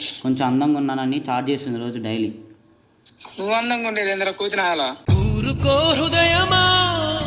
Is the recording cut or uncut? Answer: uncut